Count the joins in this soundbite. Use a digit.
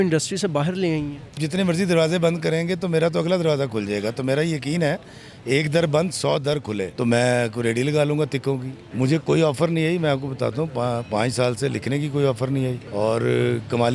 4